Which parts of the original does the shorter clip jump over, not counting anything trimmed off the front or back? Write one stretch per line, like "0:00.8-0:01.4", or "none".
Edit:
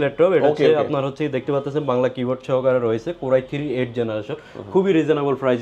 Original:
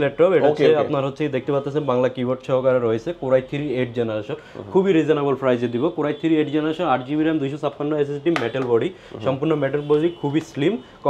none

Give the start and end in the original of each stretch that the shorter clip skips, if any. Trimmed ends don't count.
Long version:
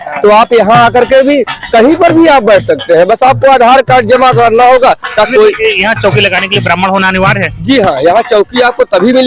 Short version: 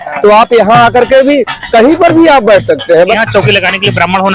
0:03.1-0:05.8

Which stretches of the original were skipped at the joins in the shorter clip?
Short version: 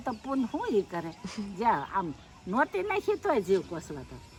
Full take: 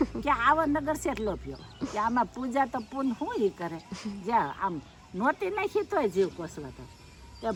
none

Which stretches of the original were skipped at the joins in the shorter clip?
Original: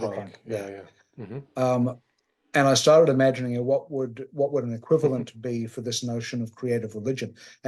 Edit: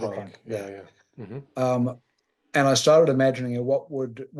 none

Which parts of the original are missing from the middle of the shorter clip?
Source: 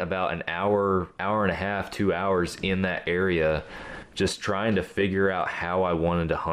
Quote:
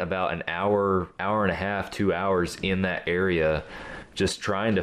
none

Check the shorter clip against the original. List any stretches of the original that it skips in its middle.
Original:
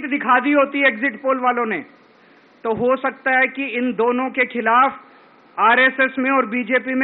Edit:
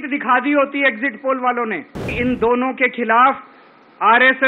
0:02.1-0:03.6

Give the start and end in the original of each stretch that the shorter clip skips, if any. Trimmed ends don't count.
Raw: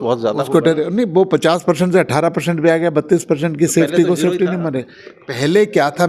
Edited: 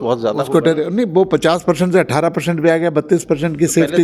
none

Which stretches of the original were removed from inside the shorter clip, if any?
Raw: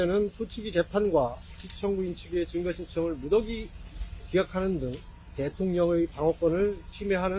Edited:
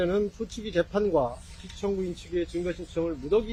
none

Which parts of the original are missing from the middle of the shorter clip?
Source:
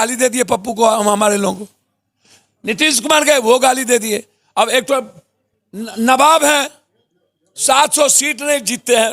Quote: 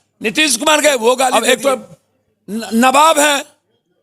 0:03.7-0:04.6

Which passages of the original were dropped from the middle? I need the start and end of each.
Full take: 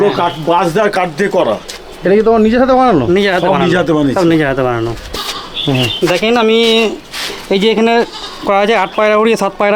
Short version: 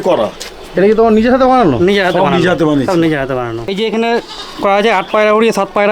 0:04.9-0:07.5

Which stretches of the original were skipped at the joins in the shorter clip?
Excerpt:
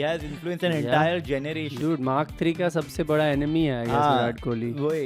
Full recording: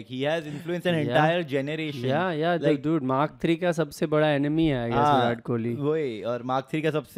0:02.0-0:02.8

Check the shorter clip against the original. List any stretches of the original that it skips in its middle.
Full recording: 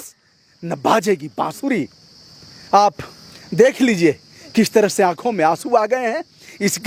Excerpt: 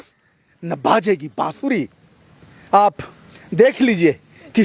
none

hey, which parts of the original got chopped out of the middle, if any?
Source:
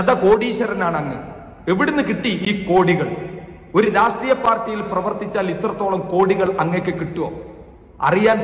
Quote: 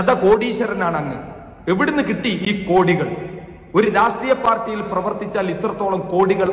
none

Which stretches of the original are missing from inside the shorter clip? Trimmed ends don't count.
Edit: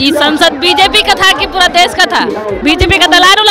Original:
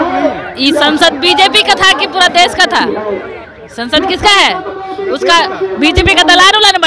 0:03.2-0:05.7

